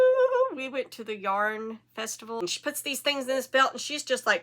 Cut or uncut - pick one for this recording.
cut